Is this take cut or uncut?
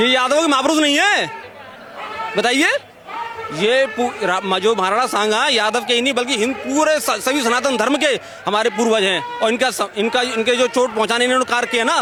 uncut